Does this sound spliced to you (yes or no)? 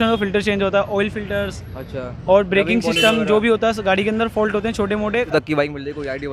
yes